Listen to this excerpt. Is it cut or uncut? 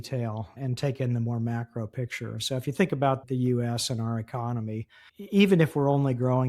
uncut